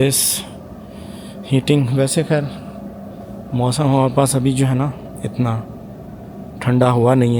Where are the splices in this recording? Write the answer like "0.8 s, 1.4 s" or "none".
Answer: none

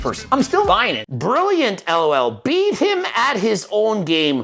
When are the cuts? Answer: 1.0 s

